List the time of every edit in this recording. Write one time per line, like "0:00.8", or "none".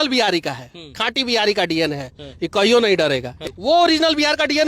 0:03.4